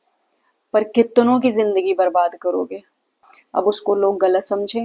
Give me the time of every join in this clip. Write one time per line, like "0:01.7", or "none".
0:03.1